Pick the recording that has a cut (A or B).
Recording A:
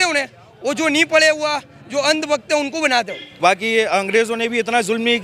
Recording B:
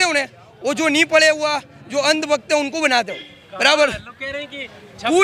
A